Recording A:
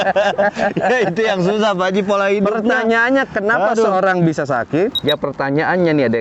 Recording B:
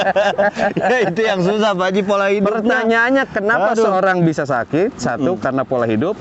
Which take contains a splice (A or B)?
A